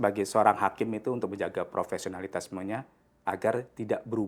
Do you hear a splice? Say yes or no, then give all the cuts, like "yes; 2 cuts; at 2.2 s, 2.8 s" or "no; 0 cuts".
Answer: no; 0 cuts